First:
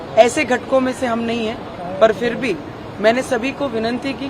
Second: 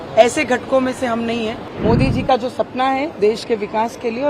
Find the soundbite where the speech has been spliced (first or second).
second